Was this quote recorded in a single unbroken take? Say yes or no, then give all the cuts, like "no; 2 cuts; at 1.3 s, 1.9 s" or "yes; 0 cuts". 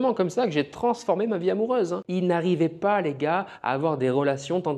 no; 1 cut; at 2.0 s